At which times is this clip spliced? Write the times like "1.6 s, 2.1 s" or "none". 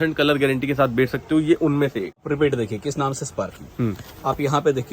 2.2 s